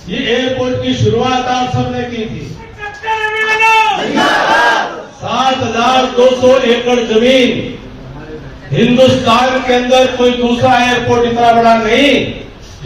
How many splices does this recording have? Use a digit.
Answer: 1